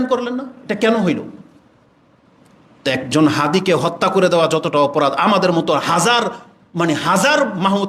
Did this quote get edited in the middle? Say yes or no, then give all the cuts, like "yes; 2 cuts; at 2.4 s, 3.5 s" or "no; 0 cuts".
no; 0 cuts